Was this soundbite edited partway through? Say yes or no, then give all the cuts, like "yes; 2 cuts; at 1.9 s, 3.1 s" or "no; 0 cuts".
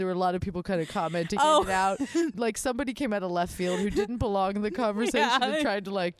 yes; 1 cut; at 2.3 s